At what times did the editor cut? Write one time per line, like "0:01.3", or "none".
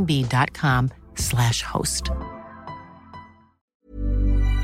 0:03.7

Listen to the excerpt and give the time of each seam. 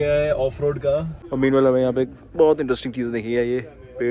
0:01.2

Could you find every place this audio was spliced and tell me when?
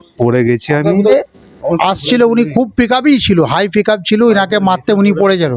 0:01.1

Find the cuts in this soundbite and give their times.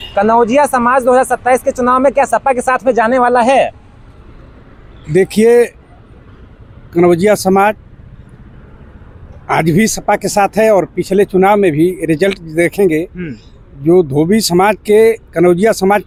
none

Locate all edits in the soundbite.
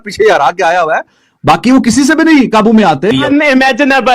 0:03.2

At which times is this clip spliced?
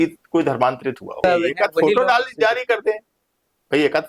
0:01.2

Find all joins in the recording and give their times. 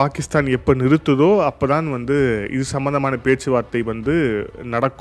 none

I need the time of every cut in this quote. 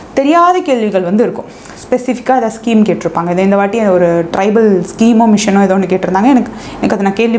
none

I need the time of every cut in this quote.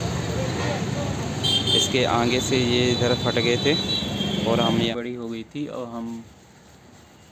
0:04.9

